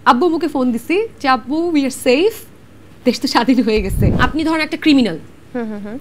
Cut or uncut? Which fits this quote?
cut